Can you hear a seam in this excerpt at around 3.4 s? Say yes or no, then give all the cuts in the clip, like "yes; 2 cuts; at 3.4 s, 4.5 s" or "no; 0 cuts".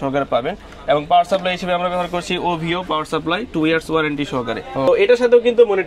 no; 1 cut; at 4.9 s